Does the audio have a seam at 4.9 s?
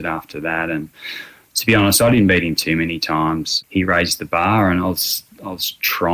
no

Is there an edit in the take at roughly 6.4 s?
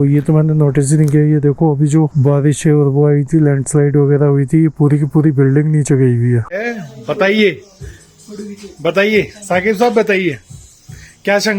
yes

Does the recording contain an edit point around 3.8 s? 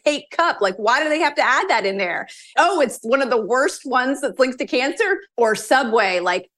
no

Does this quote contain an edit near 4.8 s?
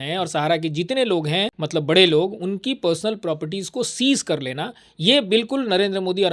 no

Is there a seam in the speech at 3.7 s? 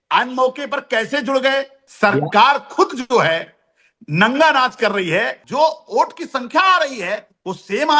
no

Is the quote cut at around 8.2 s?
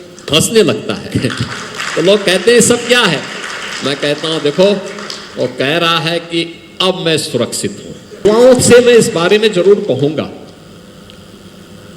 yes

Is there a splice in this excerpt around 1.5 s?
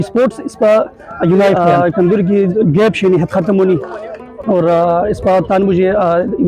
yes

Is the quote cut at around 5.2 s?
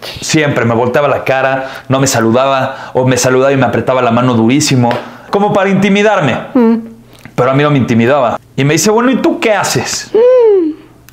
yes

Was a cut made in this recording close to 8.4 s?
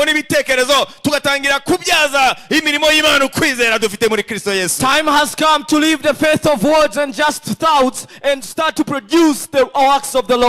yes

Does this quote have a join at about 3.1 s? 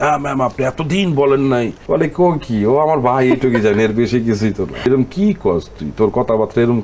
no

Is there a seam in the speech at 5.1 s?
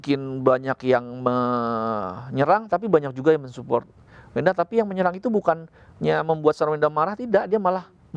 no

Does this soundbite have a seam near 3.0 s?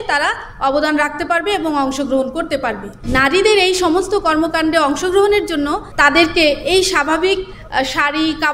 yes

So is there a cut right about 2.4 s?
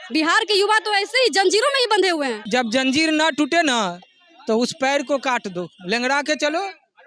yes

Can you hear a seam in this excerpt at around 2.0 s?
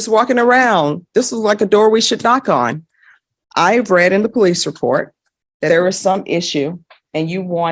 no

